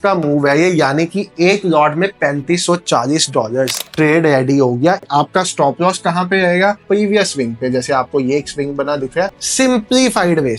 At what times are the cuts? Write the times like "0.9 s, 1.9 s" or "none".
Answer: 3.8 s, 5.0 s, 6.8 s, 9.4 s

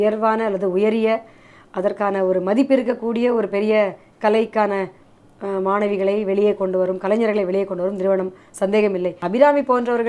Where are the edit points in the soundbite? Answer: 9.2 s

